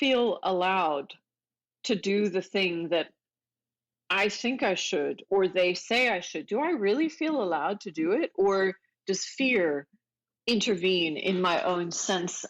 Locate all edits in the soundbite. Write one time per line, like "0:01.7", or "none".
none